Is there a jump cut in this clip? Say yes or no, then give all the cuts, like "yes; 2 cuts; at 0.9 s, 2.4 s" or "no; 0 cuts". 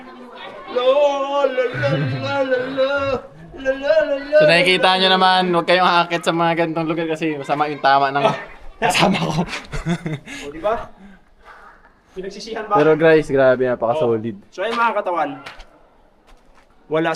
yes; 1 cut; at 3.2 s